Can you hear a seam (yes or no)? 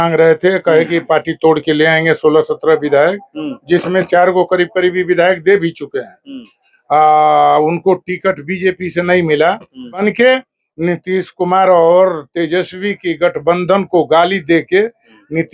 yes